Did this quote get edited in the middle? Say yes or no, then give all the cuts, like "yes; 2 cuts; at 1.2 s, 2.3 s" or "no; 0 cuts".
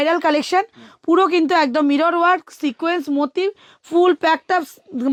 no; 0 cuts